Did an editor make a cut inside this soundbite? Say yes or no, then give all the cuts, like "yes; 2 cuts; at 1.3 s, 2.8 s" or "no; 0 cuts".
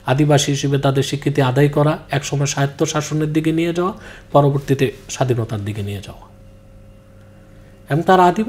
no; 0 cuts